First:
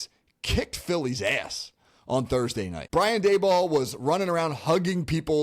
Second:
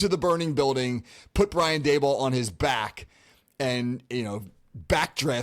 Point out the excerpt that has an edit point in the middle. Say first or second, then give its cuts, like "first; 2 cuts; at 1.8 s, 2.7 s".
first; 1 cut; at 2.8 s